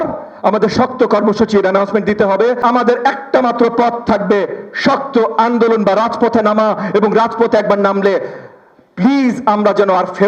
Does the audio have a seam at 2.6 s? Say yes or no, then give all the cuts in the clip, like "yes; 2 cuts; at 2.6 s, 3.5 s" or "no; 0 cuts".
yes; 1 cut; at 2.6 s